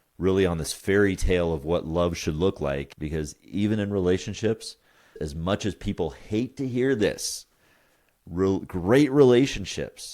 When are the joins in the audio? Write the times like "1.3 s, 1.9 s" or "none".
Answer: 2.9 s, 5.1 s

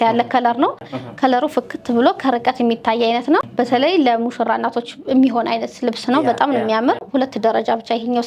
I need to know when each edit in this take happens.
0.9 s, 3.5 s, 7.1 s

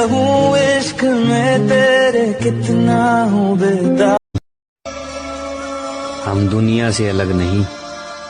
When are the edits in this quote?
4.1 s

